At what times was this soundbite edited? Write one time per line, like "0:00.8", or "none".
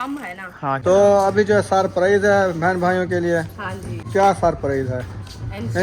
0:00.8
0:03.9